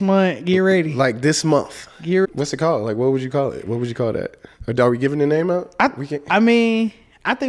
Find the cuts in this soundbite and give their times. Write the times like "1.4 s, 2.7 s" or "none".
2.3 s